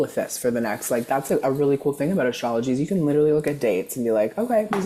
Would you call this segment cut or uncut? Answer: uncut